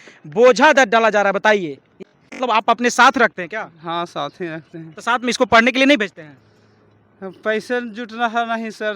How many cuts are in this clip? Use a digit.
1